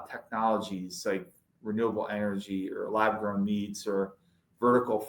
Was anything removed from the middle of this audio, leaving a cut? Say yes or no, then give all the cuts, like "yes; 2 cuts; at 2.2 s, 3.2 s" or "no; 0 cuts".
no; 0 cuts